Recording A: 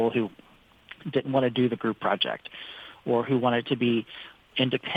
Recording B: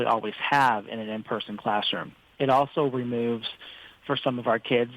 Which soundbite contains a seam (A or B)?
B